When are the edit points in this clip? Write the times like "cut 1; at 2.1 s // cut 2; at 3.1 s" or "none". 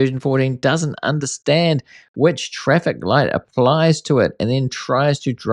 none